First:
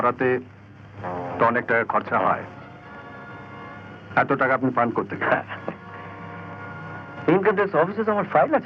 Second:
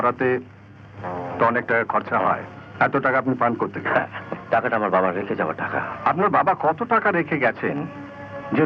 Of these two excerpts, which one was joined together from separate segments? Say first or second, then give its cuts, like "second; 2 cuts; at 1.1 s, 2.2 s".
second; 3 cuts; at 2.6 s, 4.3 s, 5.9 s